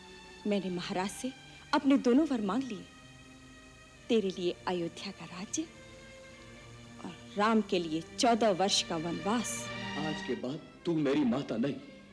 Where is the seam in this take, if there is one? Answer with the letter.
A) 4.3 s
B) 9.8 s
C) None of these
B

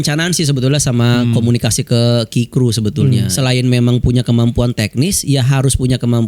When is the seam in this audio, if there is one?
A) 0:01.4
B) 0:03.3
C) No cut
B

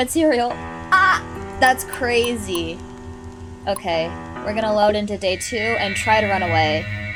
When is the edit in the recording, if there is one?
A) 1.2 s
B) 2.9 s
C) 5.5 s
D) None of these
D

